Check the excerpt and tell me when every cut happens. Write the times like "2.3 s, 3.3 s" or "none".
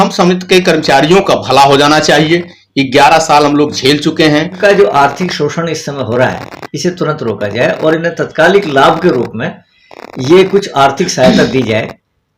4.5 s